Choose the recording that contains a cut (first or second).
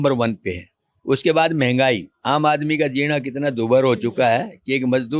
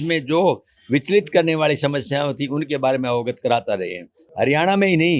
second